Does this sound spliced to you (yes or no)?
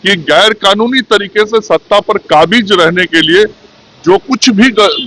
no